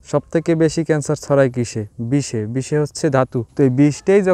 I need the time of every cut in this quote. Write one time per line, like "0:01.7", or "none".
0:03.4